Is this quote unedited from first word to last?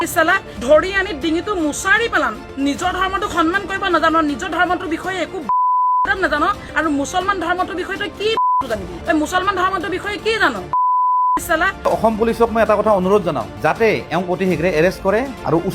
no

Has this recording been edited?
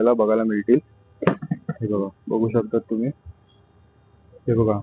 no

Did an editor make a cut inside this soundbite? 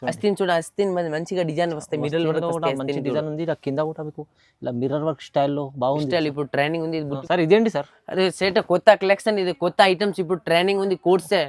yes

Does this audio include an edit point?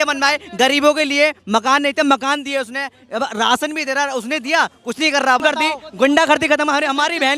yes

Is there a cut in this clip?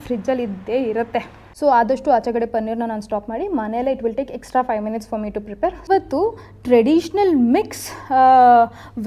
yes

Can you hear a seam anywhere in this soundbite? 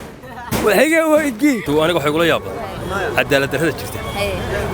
yes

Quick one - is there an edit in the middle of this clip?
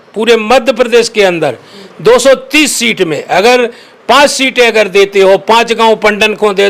no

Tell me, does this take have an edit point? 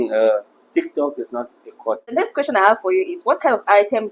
yes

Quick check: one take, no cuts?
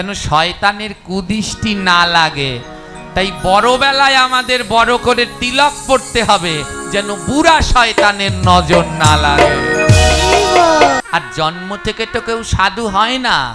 no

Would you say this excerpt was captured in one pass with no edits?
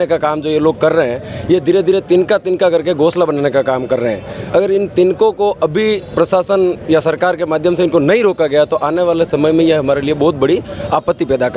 yes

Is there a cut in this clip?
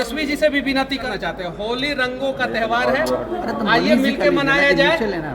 yes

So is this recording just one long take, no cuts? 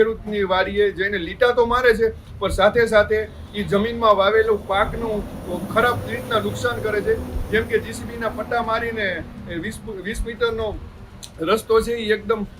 yes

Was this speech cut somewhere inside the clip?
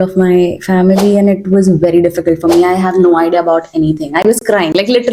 no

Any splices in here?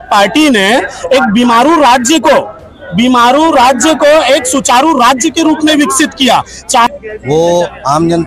yes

